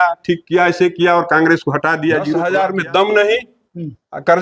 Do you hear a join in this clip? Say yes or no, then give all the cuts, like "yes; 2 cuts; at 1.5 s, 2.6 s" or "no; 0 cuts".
yes; 1 cut; at 2.3 s